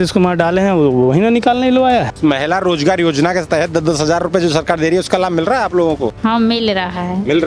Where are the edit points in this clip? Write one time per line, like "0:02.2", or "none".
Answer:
0:02.1
0:06.1

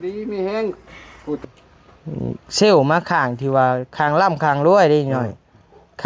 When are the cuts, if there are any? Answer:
0:01.4

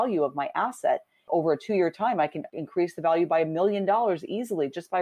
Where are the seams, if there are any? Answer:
none

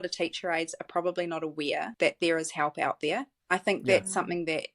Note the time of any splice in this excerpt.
0:01.9
0:03.3

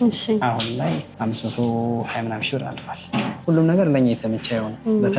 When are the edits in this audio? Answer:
0:01.1
0:03.4

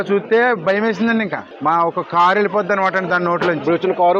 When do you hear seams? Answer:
0:01.4

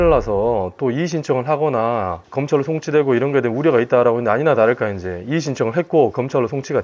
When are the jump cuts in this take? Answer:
0:02.2

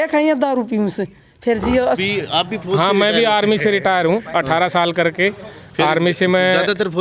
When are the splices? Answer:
0:02.0

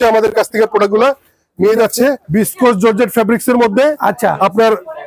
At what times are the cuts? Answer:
0:02.2

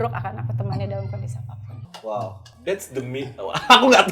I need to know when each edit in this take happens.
none

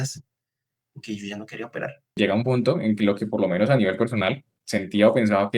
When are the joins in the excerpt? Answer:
0:02.2

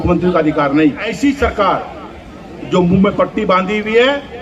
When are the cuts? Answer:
0:01.1

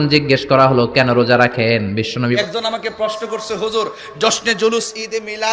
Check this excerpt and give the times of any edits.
0:02.4

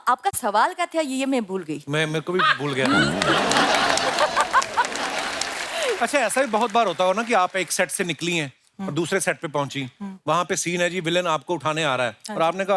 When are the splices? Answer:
0:06.0

